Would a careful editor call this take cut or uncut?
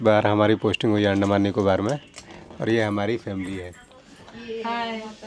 uncut